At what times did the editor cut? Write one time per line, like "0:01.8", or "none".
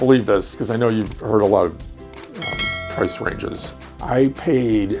none